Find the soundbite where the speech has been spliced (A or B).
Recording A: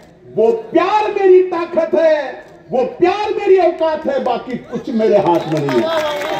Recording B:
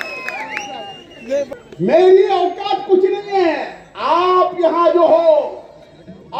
B